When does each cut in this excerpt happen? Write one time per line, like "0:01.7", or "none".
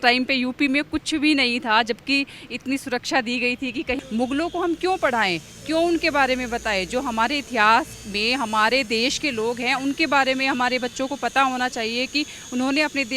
0:04.0